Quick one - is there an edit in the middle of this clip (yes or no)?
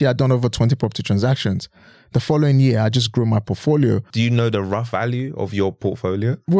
yes